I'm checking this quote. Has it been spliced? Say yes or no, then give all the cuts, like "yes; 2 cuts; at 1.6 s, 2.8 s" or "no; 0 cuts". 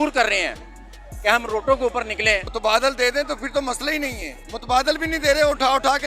yes; 1 cut; at 2.5 s